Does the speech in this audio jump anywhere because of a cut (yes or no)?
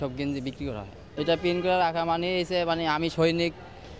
yes